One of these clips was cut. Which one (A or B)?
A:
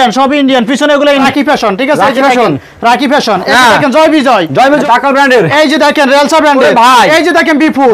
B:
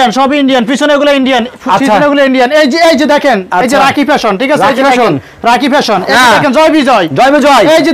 A